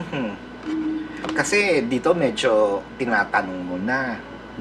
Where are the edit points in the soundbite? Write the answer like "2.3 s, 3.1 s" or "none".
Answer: none